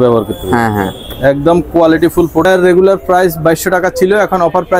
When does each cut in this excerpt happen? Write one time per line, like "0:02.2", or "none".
0:02.4

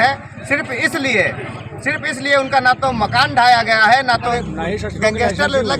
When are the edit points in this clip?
0:04.4

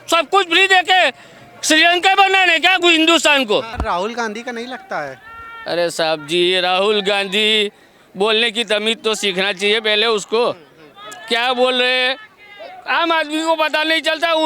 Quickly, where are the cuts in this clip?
0:03.7

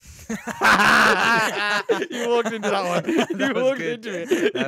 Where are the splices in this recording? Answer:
none

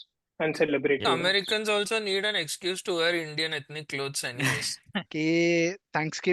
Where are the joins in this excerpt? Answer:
0:01.0
0:05.0

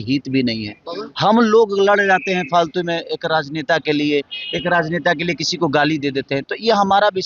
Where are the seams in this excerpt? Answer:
none

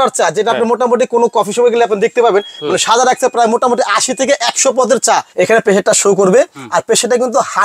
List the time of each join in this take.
0:05.3

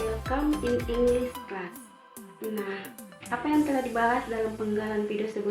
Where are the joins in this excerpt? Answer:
none

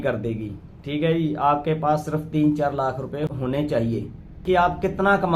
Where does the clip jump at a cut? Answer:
0:03.4
0:04.4

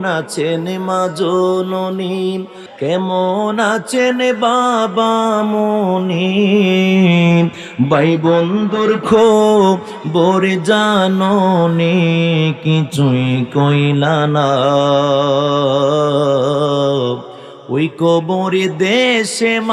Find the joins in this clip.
0:02.6

